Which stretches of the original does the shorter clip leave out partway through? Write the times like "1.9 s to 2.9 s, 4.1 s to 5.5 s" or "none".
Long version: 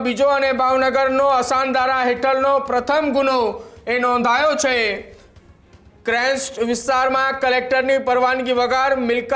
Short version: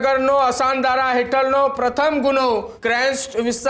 3.6 s to 5.9 s

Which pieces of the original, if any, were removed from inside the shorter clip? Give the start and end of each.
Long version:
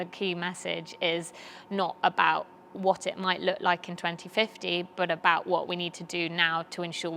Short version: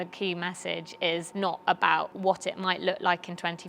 1.3 s to 1.6 s, 2.5 s to 2.7 s

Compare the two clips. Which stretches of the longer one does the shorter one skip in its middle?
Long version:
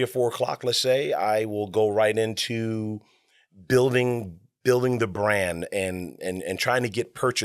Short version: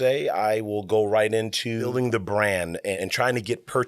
2.7 s to 4.8 s, 5.8 s to 6.4 s

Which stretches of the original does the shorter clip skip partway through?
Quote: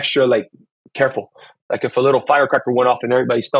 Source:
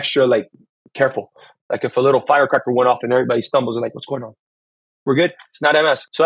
none

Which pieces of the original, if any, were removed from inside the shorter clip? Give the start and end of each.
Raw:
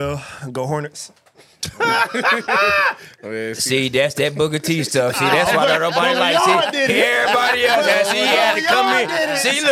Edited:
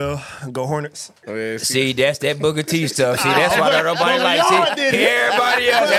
1.1 s to 3.1 s

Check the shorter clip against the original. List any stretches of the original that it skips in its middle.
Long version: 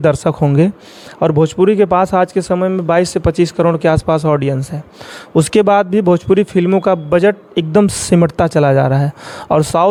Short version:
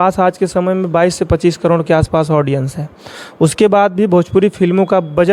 none

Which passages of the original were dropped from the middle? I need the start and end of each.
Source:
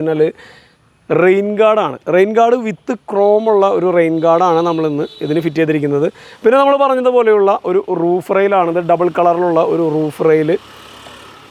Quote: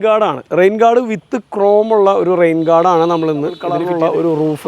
5.3 s to 9.3 s

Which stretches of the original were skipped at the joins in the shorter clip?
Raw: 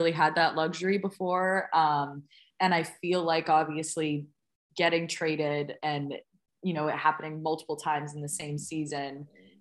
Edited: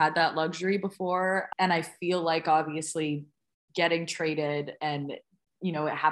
1.7 s to 2.5 s

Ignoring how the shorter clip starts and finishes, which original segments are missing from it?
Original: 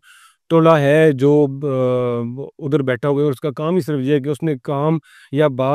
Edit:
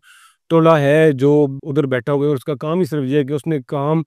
1.6 s to 2.5 s

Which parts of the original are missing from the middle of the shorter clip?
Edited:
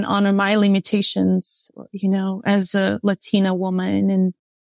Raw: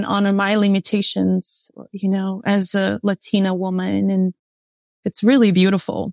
none

